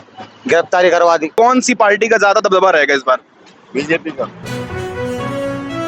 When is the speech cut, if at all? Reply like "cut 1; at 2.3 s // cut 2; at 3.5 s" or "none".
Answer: cut 1; at 1.3 s // cut 2; at 4.4 s